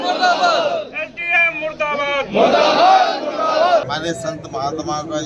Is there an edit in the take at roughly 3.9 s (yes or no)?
yes